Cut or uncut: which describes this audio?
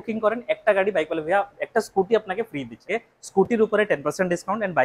cut